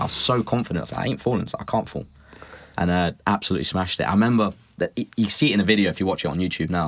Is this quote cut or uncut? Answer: uncut